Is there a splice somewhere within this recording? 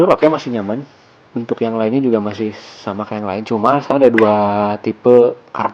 no; 0 cuts

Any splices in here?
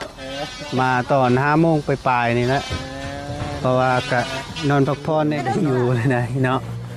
yes; 1 cut; at 5.4 s

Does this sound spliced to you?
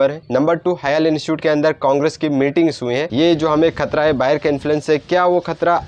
yes; 1 cut; at 3.1 s

